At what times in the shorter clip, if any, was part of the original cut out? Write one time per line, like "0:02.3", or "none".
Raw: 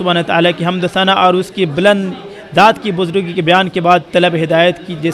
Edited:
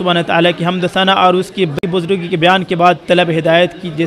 0:01.8